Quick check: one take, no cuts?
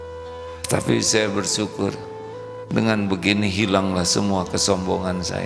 yes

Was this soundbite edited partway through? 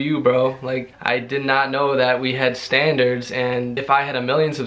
yes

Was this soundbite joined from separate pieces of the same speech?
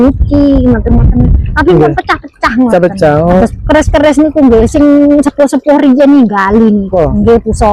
yes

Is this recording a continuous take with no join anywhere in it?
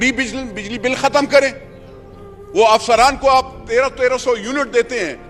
yes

